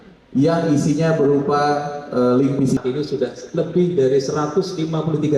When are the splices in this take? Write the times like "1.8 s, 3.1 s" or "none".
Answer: 2.8 s